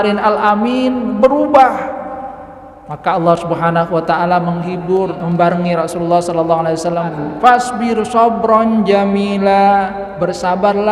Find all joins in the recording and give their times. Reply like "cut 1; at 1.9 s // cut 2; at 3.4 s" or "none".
cut 1; at 5.2 s // cut 2; at 7.1 s